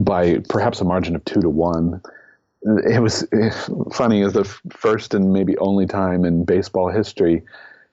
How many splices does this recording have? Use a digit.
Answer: 1